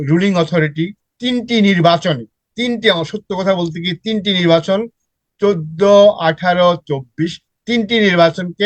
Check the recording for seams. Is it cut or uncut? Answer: uncut